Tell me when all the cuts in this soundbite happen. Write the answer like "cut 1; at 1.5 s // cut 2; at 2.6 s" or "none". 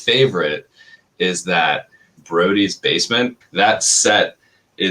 cut 1; at 2.2 s // cut 2; at 3.4 s